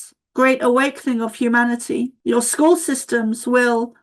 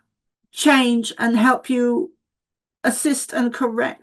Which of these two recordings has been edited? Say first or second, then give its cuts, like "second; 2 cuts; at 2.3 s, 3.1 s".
first; 1 cut; at 2.2 s